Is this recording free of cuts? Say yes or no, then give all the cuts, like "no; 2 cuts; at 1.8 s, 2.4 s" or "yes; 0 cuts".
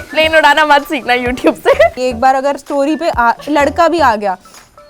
no; 1 cut; at 2.0 s